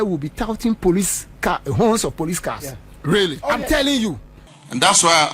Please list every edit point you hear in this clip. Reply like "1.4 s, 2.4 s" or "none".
4.3 s